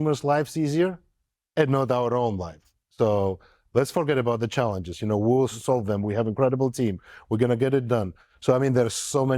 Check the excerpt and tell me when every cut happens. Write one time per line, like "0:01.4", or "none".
0:05.5
0:08.3